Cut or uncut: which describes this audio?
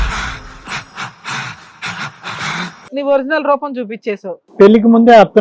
cut